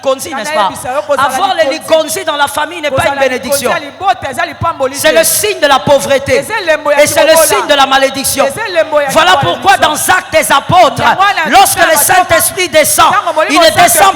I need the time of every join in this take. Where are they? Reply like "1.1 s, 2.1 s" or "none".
none